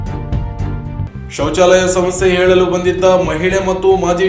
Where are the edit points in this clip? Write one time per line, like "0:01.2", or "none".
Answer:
none